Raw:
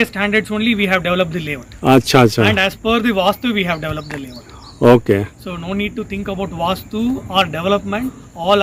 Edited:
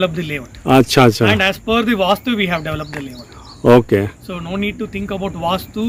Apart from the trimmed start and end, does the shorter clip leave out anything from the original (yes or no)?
no